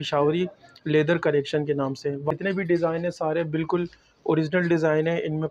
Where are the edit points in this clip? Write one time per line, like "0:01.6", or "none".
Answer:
0:02.3